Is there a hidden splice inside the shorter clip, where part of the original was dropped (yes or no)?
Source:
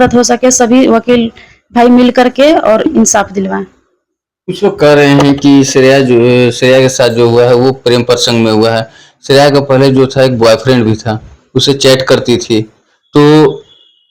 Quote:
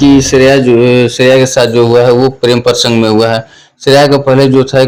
no